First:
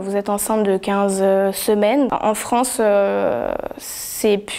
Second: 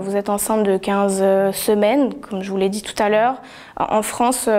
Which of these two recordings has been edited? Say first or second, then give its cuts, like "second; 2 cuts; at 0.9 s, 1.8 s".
first; 1 cut; at 2.1 s